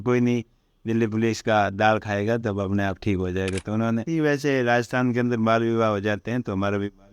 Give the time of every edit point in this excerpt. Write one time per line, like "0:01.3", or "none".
0:04.1